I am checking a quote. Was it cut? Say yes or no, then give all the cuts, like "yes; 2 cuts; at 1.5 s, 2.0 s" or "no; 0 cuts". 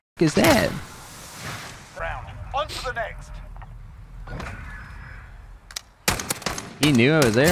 yes; 1 cut; at 2.0 s